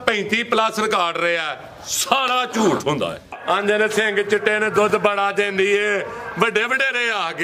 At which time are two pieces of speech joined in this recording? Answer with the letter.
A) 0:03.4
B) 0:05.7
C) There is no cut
A